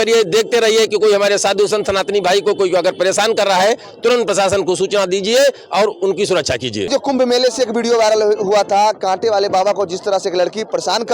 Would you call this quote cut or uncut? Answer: cut